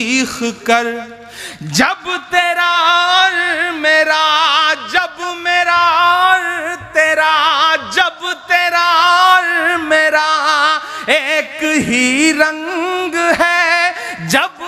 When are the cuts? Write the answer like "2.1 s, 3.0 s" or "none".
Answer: none